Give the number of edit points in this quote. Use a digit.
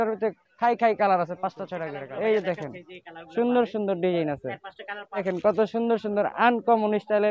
2